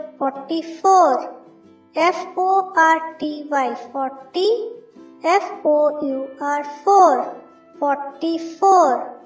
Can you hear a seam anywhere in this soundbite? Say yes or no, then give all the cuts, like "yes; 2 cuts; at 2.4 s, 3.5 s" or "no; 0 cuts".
no; 0 cuts